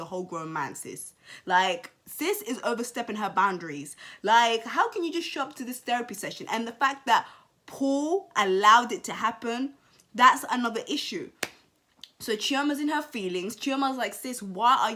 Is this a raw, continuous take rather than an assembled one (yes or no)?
yes